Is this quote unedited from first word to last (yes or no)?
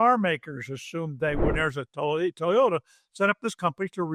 no